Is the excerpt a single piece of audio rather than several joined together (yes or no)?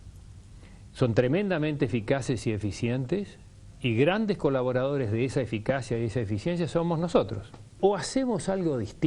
yes